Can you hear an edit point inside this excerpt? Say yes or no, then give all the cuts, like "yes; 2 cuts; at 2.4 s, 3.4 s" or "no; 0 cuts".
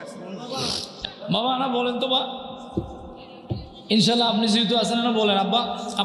yes; 1 cut; at 0.9 s